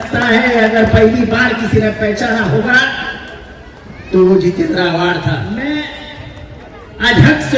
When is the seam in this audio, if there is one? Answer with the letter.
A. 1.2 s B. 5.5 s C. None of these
B